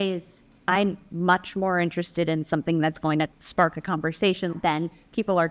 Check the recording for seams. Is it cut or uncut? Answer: cut